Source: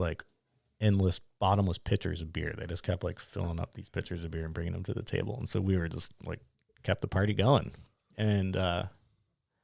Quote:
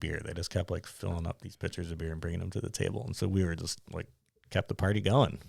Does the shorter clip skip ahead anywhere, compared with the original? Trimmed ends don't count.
no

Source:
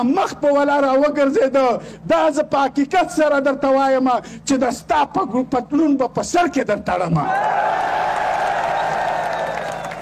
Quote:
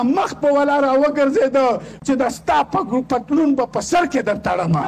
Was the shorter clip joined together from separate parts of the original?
yes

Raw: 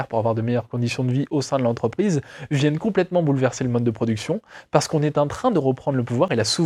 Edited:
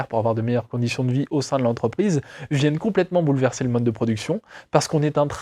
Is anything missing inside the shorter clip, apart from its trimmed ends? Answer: no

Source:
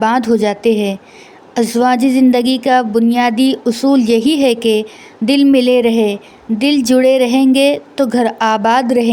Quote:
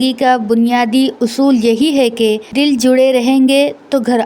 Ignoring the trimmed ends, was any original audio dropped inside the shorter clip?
yes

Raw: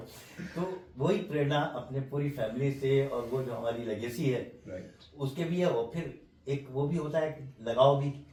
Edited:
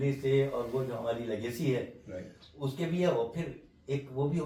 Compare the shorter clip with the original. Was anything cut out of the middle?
no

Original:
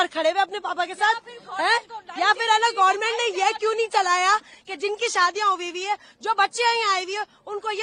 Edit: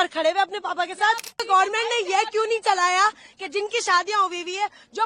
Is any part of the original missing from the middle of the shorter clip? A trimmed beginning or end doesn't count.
yes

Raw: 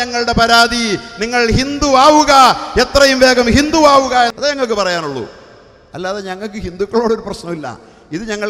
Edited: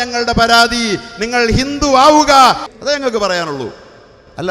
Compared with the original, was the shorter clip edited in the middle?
yes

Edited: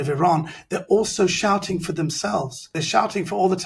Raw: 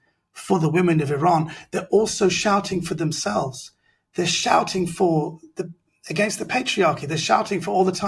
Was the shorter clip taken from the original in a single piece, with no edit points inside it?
no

